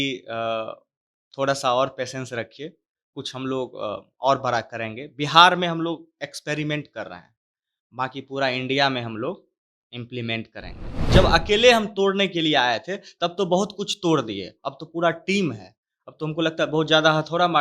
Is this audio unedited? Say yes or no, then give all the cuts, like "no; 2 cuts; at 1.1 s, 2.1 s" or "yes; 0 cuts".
no; 1 cut; at 10.9 s